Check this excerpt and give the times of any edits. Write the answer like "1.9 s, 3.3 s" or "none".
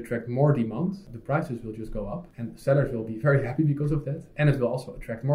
1.1 s, 2.3 s